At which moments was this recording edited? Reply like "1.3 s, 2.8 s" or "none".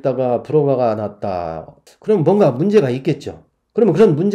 none